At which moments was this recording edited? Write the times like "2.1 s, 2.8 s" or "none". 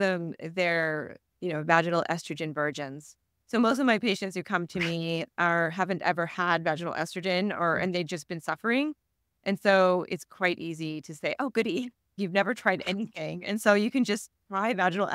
none